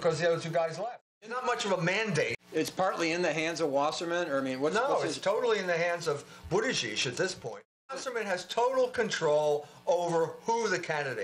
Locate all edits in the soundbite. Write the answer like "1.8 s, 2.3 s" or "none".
1.2 s, 2.4 s, 7.9 s